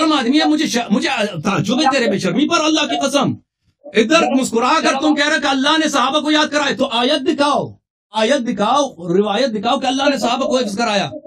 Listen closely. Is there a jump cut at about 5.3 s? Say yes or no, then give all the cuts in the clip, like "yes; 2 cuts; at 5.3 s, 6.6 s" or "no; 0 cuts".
no; 0 cuts